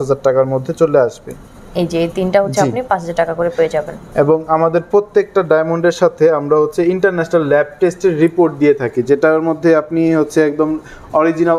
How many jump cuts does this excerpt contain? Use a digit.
0